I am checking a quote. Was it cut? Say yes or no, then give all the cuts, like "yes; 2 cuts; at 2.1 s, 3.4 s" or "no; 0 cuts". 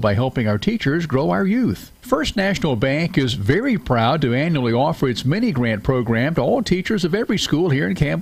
yes; 1 cut; at 1.9 s